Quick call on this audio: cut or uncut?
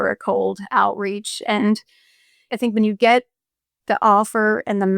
cut